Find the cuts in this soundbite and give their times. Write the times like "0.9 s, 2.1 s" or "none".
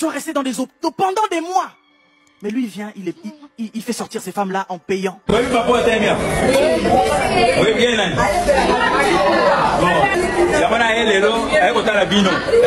none